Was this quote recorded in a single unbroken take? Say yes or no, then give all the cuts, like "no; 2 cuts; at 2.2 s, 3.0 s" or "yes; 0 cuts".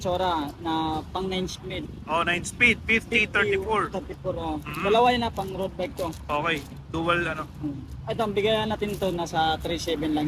yes; 0 cuts